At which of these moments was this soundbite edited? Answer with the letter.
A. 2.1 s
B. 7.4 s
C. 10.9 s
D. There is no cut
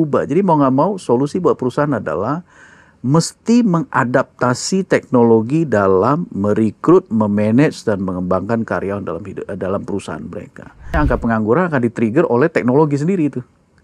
C